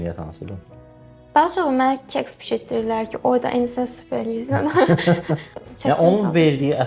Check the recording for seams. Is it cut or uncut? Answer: cut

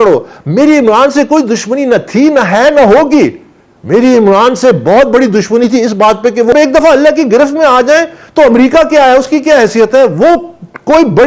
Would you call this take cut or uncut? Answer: cut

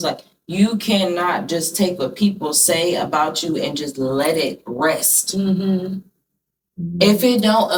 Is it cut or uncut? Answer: uncut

